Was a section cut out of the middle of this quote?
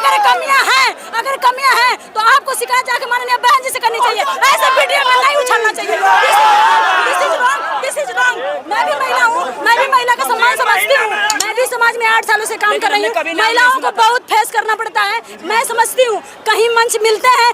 yes; 1 cut; at 11.4 s

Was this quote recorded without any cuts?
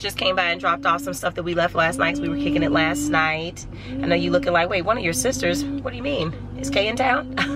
yes; 0 cuts

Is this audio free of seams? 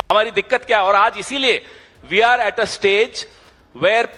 yes; 0 cuts

